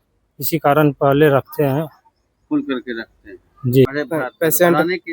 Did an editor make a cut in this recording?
yes; 1 cut; at 3.9 s

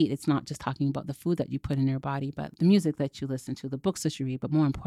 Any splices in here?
yes; 1 cut; at 2.4 s

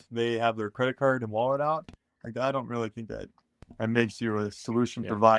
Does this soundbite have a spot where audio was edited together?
no; 0 cuts

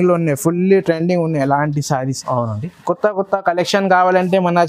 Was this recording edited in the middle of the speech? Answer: no; 0 cuts

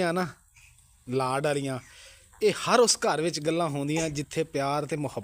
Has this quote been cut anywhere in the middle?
no; 0 cuts

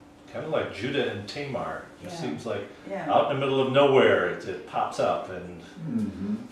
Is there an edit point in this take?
yes; 1 cut; at 1.2 s

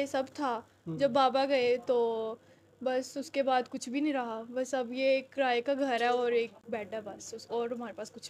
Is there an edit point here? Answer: no; 0 cuts

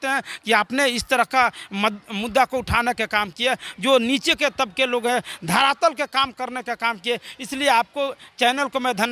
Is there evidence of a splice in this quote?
no; 0 cuts

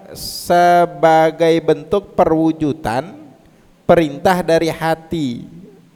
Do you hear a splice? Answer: no; 0 cuts

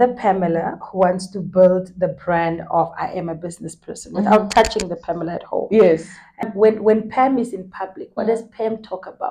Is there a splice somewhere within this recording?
yes; 1 cut; at 6.5 s

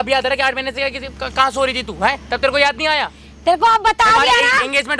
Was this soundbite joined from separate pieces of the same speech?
no; 0 cuts

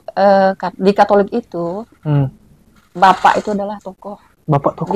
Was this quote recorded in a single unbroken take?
yes; 0 cuts

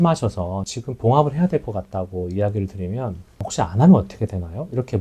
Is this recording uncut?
no; 1 cut; at 3.5 s

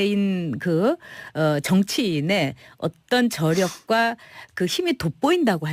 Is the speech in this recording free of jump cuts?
yes; 0 cuts

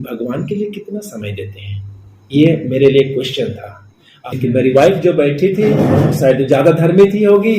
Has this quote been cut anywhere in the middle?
yes; 1 cut; at 4.2 s

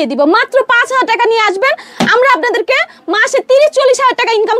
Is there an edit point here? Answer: no; 0 cuts

